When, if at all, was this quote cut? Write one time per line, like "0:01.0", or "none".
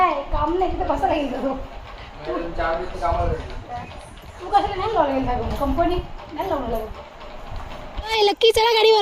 0:08.1